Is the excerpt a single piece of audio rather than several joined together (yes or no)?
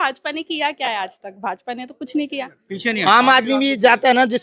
no